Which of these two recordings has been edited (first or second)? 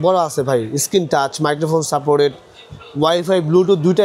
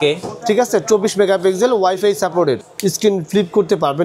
second